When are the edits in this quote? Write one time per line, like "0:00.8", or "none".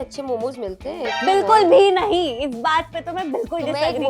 none